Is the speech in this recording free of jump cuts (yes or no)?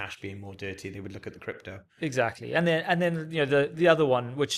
yes